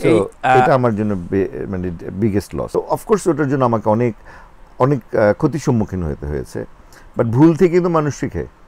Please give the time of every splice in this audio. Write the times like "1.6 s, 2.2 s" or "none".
2.7 s